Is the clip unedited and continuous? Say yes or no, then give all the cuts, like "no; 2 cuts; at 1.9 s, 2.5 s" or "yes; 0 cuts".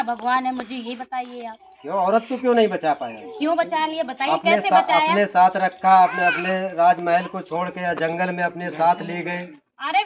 yes; 0 cuts